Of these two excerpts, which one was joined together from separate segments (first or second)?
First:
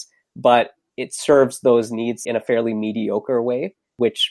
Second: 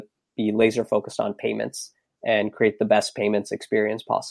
first